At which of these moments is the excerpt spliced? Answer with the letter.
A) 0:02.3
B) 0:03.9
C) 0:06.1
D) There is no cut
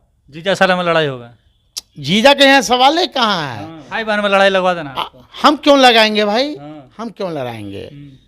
B